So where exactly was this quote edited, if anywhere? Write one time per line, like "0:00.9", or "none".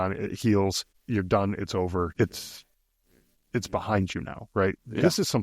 0:00.9
0:02.1